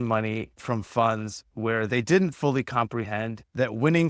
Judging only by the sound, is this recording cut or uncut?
uncut